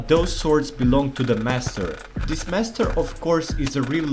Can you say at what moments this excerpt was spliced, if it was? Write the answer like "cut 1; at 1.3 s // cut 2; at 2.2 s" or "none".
cut 1; at 2.7 s